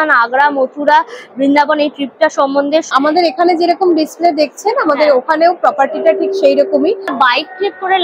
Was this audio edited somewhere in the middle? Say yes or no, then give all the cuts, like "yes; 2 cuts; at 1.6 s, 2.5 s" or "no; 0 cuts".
yes; 2 cuts; at 2.9 s, 7.1 s